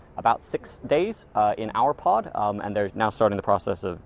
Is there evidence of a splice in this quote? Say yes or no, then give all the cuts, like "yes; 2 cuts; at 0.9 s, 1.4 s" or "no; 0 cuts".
yes; 2 cuts; at 2.0 s, 2.9 s